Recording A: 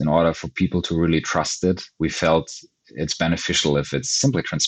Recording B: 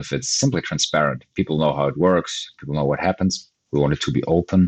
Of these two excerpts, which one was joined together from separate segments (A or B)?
B